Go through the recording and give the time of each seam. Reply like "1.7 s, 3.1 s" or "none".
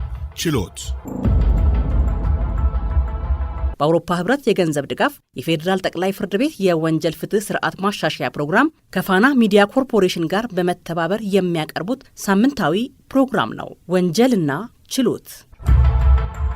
0.9 s, 3.7 s